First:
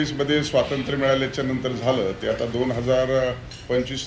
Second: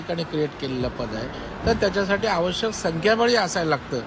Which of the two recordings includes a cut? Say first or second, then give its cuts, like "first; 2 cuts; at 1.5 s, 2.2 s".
second; 1 cut; at 1.4 s